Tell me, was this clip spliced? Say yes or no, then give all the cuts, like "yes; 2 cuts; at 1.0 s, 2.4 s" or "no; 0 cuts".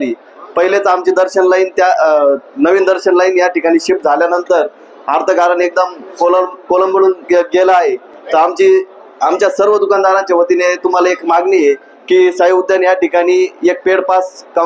no; 0 cuts